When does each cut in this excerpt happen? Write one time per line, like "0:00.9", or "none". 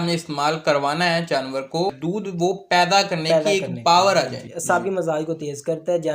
0:02.0
0:04.5